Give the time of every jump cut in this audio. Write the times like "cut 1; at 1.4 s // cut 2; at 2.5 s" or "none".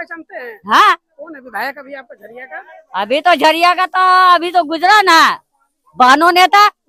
none